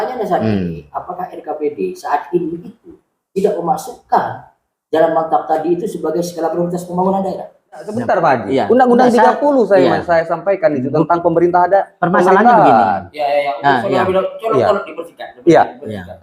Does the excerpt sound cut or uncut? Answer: cut